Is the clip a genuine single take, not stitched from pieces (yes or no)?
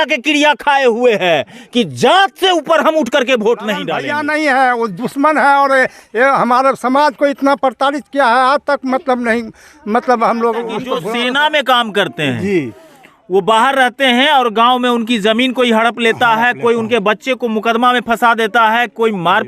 no